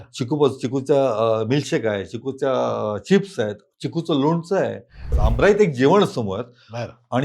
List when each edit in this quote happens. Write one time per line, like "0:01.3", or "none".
0:05.2